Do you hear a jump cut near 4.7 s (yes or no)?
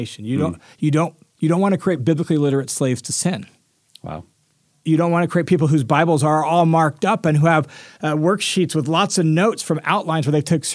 yes